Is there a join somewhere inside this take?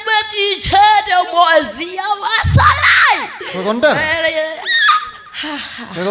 no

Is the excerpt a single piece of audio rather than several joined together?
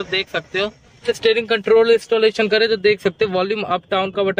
no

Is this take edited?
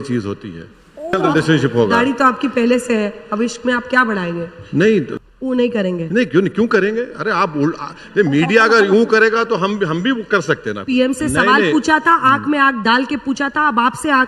yes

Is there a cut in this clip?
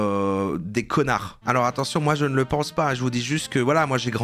yes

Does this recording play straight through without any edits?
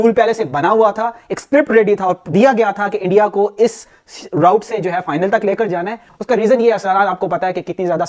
yes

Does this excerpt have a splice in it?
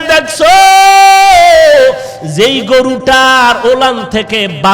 no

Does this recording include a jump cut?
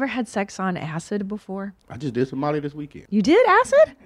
yes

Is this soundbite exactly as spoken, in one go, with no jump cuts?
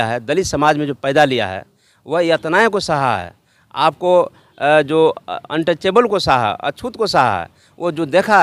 yes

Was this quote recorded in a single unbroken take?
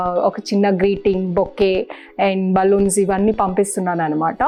yes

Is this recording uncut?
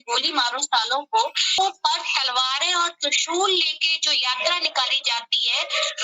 no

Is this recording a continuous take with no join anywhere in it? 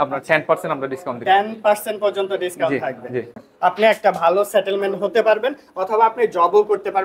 no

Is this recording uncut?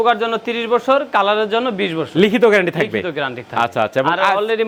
yes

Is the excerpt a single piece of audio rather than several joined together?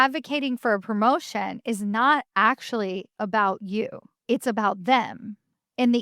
no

